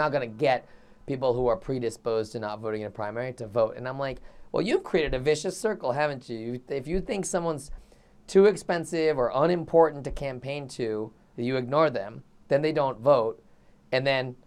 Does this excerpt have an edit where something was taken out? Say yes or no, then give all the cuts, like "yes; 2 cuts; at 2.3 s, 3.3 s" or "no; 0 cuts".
no; 0 cuts